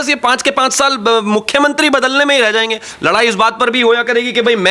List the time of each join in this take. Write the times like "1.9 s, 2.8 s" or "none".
none